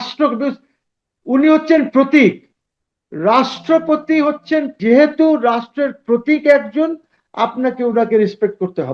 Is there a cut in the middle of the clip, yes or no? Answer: yes